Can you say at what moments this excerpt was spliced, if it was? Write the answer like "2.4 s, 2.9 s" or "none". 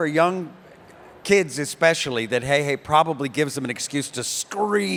none